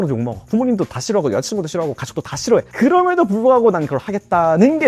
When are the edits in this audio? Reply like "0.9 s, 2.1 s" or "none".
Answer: none